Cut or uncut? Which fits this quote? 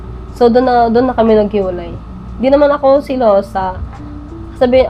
uncut